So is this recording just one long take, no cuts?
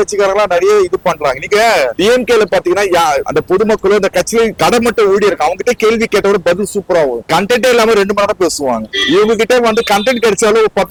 yes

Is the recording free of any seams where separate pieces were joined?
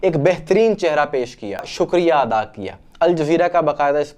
no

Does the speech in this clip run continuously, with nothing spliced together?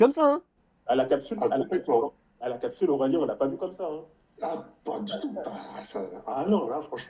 yes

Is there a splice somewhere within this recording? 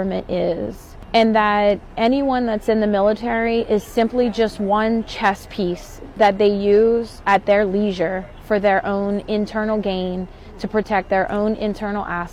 no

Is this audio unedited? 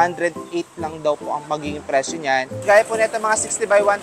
no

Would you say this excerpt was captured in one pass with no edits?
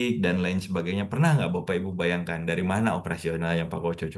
yes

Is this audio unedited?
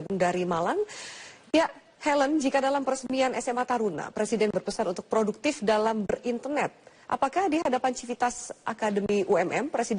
no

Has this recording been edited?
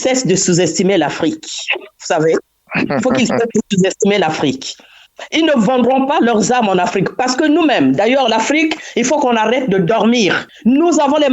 yes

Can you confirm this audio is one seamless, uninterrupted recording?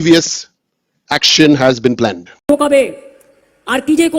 no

